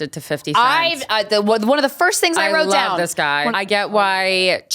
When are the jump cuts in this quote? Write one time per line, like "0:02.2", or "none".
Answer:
0:03.5